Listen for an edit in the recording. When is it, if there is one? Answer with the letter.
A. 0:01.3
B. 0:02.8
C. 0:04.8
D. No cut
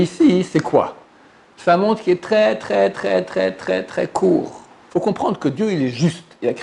C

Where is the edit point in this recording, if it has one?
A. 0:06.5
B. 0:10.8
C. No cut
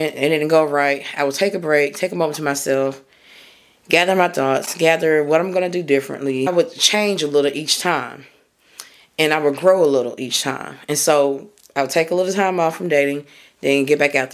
A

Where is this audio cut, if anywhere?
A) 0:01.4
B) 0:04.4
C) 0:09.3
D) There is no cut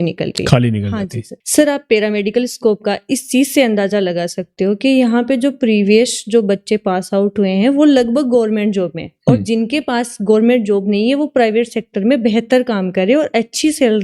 A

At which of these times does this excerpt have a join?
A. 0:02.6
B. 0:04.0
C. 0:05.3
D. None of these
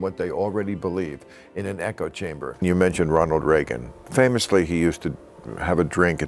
A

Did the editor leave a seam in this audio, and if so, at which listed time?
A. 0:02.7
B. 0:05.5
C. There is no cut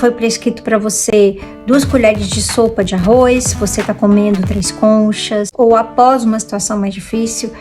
B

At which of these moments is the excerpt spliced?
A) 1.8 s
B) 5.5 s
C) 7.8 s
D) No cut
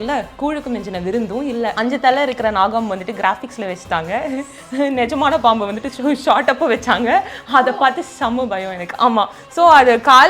A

